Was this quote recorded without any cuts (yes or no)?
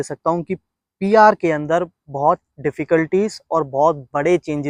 yes